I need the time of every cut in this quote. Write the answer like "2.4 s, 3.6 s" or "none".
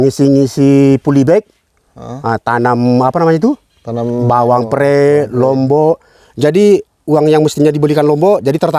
none